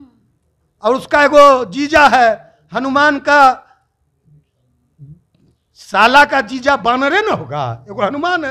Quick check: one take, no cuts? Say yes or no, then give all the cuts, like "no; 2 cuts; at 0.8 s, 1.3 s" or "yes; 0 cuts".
yes; 0 cuts